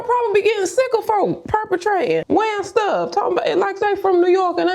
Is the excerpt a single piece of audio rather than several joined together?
yes; 0 cuts

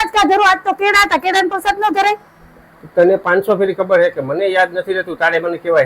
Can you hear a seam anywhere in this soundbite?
no; 0 cuts

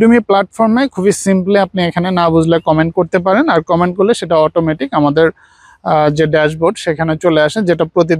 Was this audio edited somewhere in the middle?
no; 0 cuts

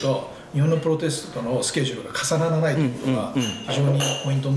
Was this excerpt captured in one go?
yes; 0 cuts

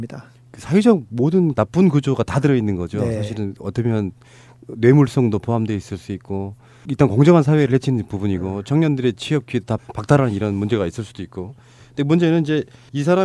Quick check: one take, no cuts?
no; 1 cut; at 8.3 s

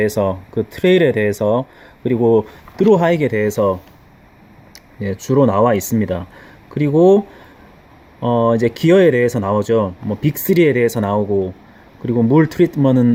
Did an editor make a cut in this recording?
no; 0 cuts

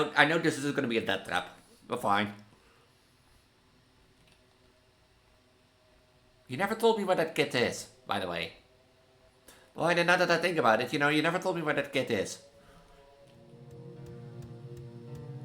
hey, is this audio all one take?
no; 1 cut; at 13.6 s

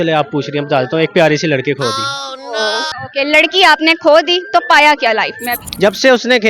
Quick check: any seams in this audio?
yes; 2 cuts; at 2.9 s, 5.7 s

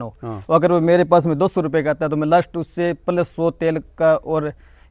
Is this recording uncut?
yes; 0 cuts

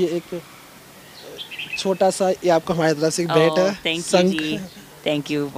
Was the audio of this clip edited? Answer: no; 0 cuts

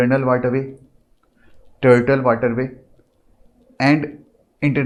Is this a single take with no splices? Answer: yes; 0 cuts

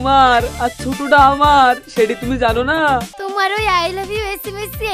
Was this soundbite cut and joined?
yes; 1 cut; at 3.1 s

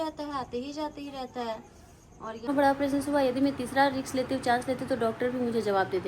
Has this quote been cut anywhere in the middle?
yes; 1 cut; at 2.5 s

